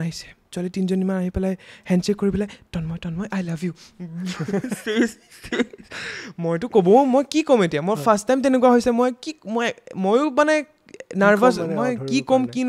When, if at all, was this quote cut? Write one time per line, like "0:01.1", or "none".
none